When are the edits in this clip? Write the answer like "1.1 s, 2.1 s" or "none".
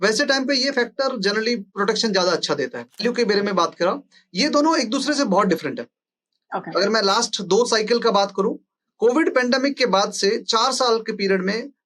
3.0 s